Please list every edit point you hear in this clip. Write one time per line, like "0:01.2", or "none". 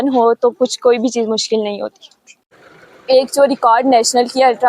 0:02.6